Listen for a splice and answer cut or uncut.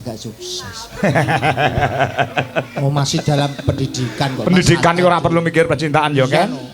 uncut